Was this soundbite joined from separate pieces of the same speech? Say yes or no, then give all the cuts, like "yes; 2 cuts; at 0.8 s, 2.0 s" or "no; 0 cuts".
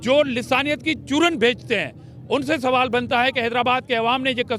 no; 0 cuts